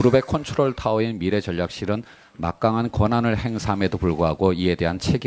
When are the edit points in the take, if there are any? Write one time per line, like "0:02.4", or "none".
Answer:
0:02.2